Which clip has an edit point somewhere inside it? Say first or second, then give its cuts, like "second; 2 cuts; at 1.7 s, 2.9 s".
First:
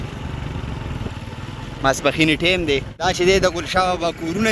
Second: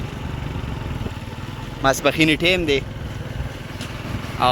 first; 1 cut; at 2.9 s